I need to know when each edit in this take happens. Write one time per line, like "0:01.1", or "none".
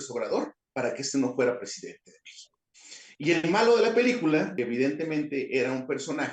0:04.5